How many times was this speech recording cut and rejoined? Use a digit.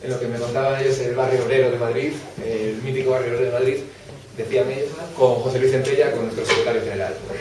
1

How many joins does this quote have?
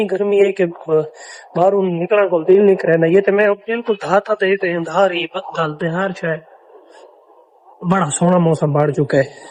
0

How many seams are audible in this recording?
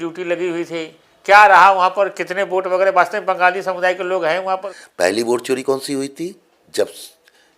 1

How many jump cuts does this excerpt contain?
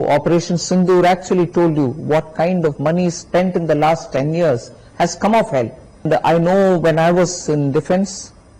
1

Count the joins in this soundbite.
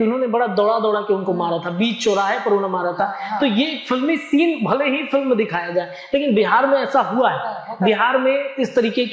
0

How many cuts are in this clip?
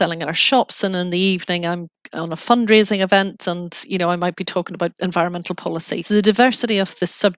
2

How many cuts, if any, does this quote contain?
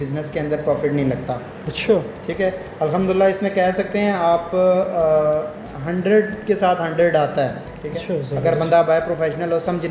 0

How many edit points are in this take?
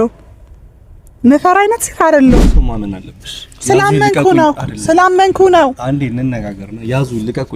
1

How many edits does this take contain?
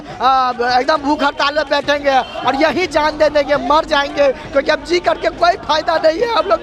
0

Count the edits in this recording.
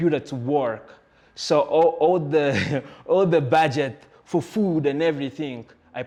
0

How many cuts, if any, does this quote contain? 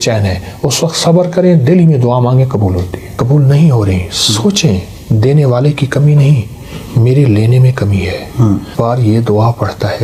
2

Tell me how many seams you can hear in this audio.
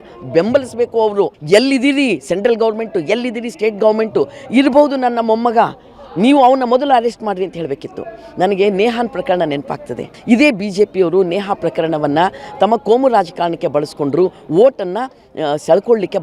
0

